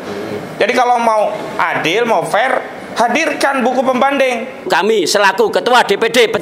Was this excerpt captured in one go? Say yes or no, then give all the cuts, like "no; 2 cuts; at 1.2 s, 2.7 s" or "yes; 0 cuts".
no; 1 cut; at 4.7 s